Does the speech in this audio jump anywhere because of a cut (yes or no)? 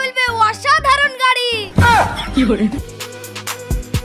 yes